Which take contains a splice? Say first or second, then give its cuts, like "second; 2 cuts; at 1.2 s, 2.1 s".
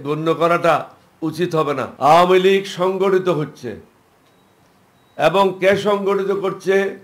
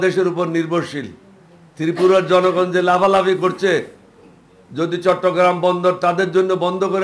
first; 1 cut; at 1.9 s